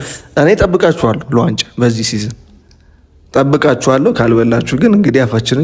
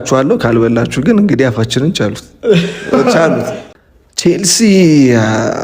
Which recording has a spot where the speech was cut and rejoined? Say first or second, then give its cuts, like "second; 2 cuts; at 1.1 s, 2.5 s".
second; 1 cut; at 3.6 s